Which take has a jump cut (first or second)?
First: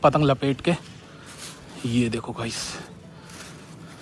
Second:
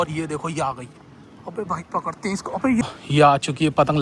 second